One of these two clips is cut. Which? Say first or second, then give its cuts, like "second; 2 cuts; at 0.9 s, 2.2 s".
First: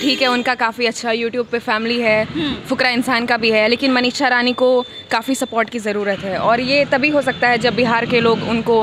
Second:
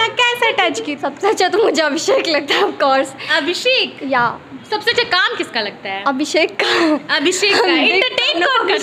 second; 2 cuts; at 0.9 s, 4.5 s